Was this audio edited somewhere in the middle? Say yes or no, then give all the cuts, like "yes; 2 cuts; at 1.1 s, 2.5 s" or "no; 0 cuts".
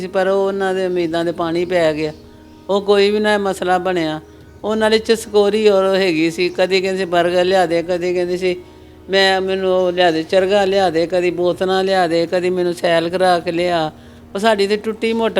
no; 0 cuts